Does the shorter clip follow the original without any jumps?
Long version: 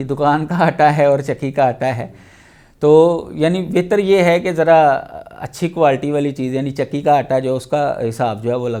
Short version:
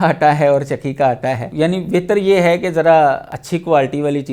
no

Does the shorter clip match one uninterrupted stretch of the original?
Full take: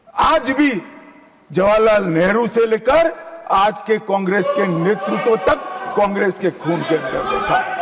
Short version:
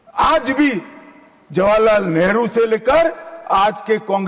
yes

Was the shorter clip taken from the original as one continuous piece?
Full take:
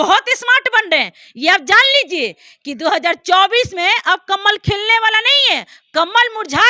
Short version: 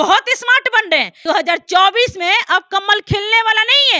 no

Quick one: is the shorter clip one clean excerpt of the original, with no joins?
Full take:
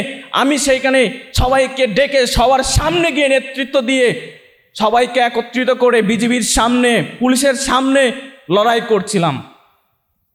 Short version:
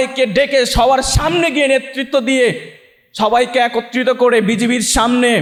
yes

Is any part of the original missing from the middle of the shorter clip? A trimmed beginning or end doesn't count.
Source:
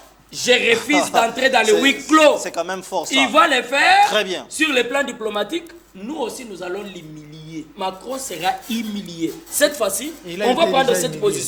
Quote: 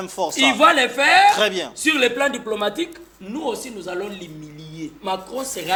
no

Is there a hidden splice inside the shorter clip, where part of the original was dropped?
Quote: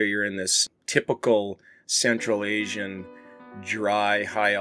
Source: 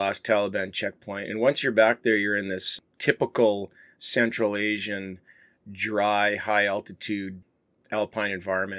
no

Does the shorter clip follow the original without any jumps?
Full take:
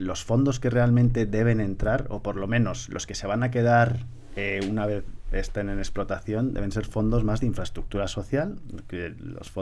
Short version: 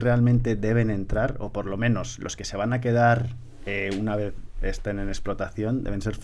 yes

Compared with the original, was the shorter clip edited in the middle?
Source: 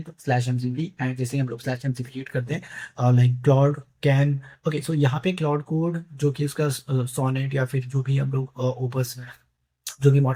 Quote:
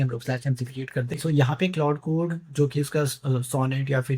yes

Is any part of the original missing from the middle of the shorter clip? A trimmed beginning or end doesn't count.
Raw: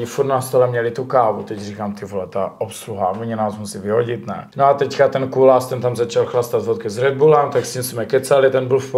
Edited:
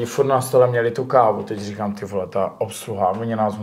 no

